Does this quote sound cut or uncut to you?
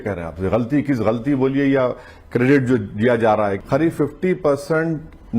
cut